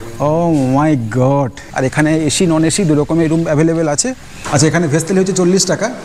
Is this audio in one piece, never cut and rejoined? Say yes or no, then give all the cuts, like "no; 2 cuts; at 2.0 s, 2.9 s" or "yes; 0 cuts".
no; 2 cuts; at 1.6 s, 4.3 s